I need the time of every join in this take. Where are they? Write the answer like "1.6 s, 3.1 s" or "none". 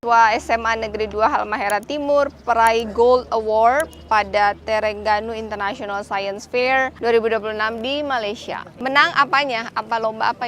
6.9 s, 8.7 s